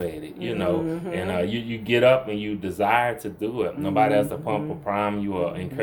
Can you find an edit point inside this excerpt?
no; 0 cuts

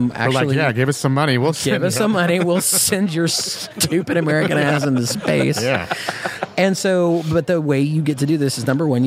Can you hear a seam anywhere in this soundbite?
no; 0 cuts

